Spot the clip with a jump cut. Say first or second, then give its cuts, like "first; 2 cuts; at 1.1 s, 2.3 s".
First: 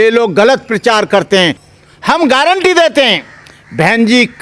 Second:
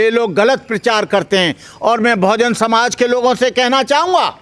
first; 1 cut; at 1.7 s